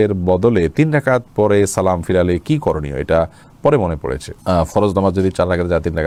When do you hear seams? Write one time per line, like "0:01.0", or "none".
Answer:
none